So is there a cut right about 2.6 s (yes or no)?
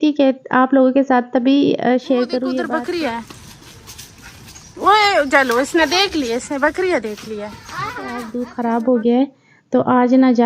yes